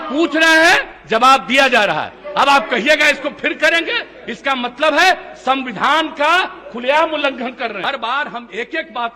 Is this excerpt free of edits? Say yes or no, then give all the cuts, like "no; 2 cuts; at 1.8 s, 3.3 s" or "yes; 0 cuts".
no; 1 cut; at 7.8 s